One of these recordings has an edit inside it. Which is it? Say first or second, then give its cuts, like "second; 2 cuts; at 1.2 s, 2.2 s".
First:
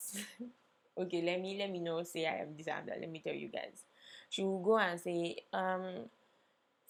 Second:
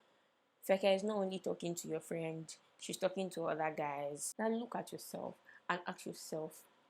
second; 1 cut; at 4.2 s